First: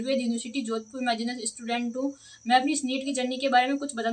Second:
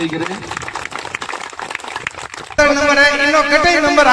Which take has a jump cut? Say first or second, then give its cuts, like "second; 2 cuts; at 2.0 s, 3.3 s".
second; 1 cut; at 2.6 s